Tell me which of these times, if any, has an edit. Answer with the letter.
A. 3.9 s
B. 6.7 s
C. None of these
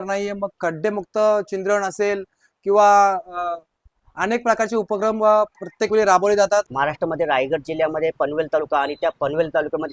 B